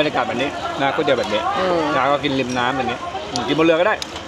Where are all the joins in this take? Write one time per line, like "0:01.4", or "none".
none